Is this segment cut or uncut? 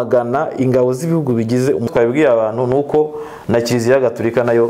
cut